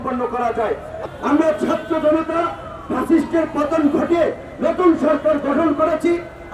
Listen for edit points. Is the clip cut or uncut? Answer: cut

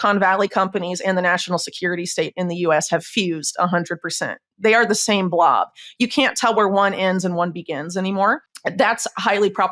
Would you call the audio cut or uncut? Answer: cut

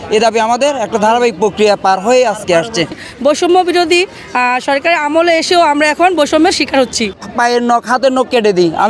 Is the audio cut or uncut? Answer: cut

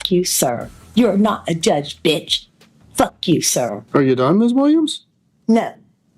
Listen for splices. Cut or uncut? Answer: cut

